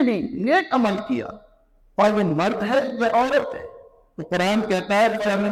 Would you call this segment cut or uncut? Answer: uncut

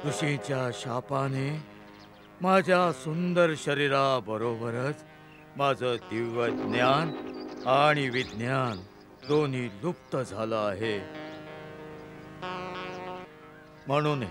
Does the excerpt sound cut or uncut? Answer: cut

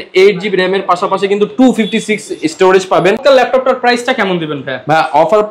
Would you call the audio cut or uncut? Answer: uncut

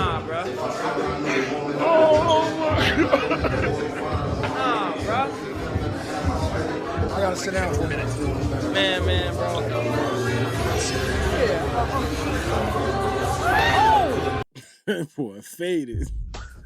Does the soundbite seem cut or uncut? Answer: cut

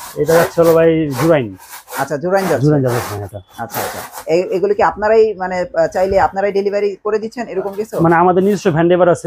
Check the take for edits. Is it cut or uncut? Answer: uncut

